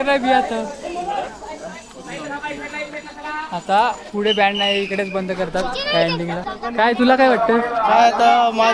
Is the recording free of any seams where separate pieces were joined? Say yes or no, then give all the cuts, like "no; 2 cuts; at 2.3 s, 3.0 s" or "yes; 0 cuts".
yes; 0 cuts